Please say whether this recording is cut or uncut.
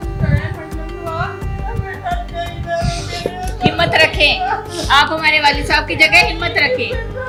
uncut